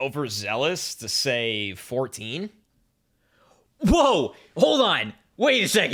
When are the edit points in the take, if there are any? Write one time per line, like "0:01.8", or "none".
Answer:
none